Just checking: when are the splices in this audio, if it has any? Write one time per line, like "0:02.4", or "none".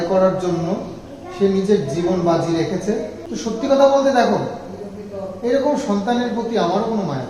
0:03.6